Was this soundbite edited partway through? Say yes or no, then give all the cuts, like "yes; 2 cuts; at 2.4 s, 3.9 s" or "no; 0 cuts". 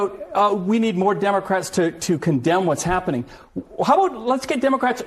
no; 0 cuts